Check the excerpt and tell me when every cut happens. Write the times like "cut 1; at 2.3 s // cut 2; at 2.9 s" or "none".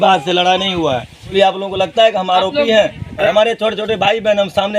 cut 1; at 1.3 s // cut 2; at 3.3 s